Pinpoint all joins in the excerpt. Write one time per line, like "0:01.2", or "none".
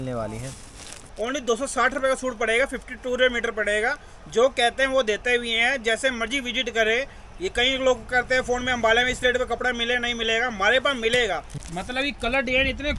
0:01.0
0:11.5